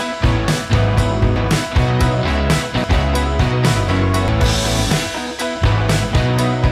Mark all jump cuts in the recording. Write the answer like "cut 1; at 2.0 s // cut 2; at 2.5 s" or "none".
cut 1; at 1.4 s // cut 2; at 2.8 s // cut 3; at 4.3 s